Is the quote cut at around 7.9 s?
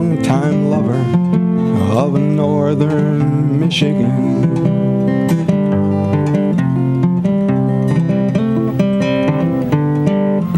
yes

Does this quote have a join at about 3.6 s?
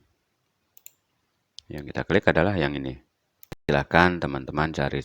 yes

